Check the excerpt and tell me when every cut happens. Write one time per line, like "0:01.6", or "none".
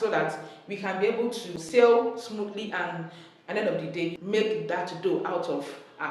0:01.6
0:04.2